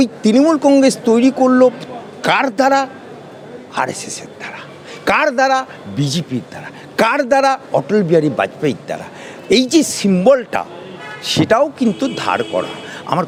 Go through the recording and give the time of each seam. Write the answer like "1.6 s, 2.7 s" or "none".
none